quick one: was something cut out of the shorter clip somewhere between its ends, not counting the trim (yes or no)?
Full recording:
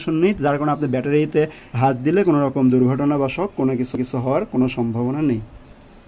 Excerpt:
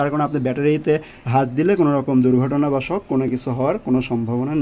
yes